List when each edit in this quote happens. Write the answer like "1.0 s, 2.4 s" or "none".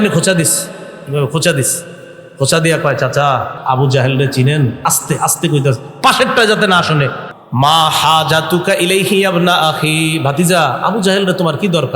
3.5 s, 7.2 s